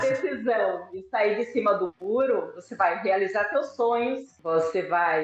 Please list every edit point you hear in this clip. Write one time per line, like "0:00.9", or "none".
none